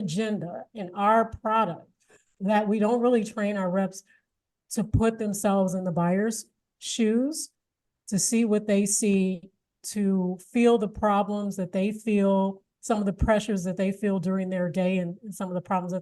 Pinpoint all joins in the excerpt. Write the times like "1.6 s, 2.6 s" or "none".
9.8 s